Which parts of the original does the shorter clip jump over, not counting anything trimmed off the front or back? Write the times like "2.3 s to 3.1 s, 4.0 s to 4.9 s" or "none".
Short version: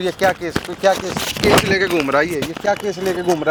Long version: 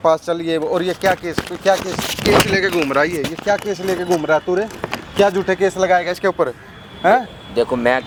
none